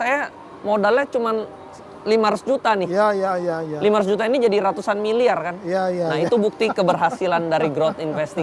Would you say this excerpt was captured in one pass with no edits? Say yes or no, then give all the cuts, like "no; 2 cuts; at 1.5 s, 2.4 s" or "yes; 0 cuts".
yes; 0 cuts